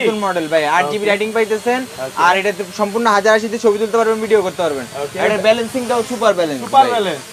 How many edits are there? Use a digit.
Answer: 0